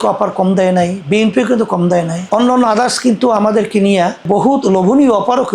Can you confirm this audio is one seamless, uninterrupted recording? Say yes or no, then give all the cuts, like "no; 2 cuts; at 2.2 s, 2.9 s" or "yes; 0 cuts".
yes; 0 cuts